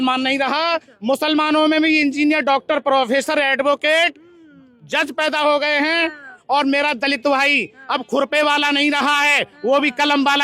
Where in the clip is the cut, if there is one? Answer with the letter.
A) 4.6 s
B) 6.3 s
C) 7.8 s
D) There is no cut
B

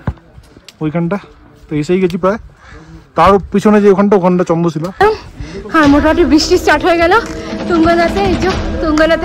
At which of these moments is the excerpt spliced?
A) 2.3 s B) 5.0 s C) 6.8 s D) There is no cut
B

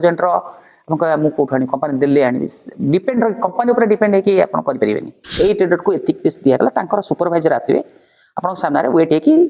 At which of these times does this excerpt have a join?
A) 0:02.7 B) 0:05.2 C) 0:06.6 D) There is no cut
B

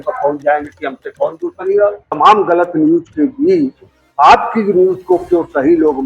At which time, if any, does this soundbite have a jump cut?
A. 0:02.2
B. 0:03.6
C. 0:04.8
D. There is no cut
A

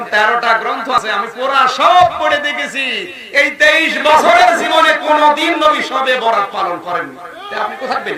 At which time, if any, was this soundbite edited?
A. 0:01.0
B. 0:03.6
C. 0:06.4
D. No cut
A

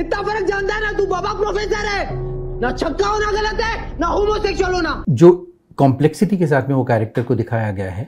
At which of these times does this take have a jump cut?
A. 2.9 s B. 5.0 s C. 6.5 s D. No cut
B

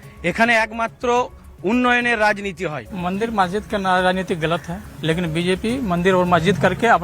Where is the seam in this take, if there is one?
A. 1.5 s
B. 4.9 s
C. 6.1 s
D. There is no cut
B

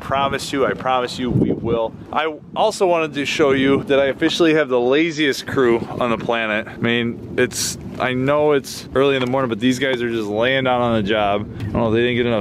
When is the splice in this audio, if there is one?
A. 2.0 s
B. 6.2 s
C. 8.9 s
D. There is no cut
A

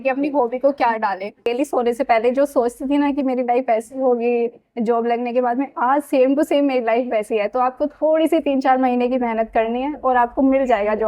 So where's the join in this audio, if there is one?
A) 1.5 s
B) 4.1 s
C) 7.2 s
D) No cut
A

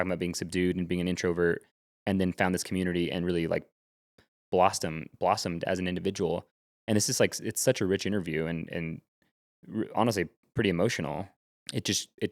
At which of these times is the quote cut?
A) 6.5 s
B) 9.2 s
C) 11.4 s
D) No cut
C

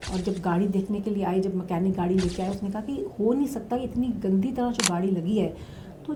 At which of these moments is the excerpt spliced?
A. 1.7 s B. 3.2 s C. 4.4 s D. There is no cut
D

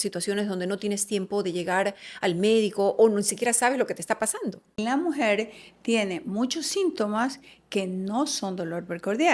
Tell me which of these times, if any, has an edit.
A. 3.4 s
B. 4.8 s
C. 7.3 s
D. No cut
B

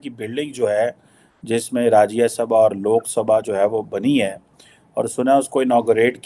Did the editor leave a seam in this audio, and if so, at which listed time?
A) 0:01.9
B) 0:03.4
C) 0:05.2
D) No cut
D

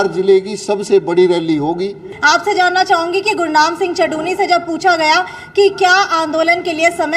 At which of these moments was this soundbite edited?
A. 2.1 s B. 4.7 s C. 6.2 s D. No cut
A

